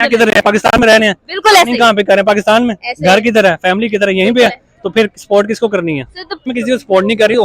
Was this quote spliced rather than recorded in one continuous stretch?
yes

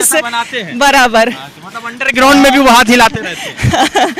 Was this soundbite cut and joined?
no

